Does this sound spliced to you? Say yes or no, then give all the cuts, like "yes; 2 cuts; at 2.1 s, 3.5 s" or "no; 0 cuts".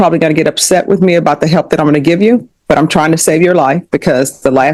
no; 0 cuts